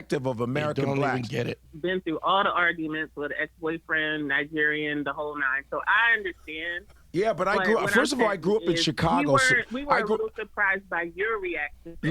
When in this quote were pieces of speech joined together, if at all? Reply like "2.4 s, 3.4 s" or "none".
1.6 s

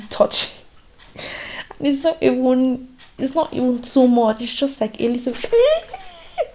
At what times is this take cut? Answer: 5.2 s

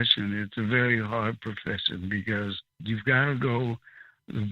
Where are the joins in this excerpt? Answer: 2.8 s

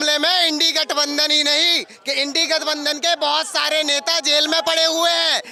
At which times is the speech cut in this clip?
none

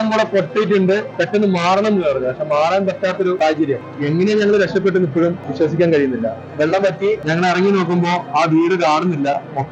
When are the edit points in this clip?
1.1 s, 3.5 s, 5.4 s, 7.2 s

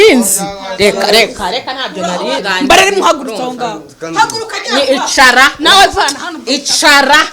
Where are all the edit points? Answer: 2.5 s

